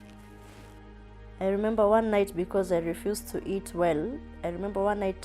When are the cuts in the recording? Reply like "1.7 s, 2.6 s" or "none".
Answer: 1.4 s